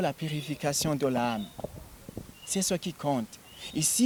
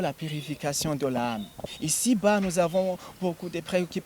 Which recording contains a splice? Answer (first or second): second